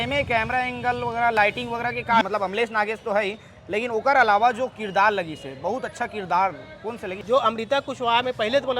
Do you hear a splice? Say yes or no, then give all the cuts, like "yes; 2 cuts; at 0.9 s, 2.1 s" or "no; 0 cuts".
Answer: yes; 2 cuts; at 2.2 s, 7.1 s